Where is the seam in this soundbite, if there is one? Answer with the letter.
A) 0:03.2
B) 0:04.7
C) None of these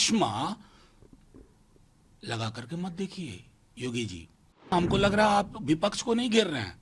B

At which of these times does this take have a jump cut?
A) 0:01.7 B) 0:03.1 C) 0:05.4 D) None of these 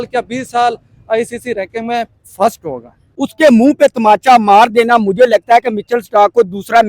B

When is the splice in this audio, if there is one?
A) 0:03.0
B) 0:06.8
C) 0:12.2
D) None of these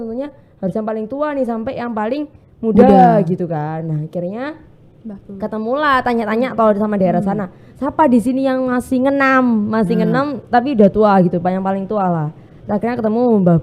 D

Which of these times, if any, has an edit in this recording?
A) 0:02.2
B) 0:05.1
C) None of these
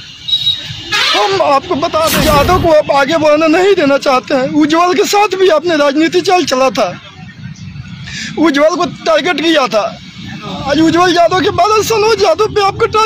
A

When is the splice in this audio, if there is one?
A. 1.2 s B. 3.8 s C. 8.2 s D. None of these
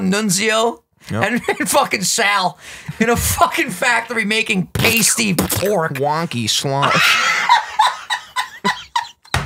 D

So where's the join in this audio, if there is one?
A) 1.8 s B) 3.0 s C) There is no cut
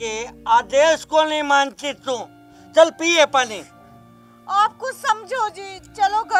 C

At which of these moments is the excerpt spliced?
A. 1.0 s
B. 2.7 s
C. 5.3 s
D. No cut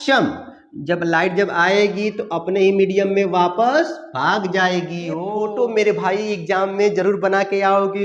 C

